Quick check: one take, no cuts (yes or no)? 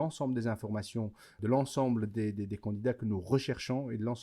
no